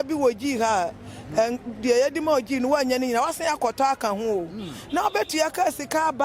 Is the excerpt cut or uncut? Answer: uncut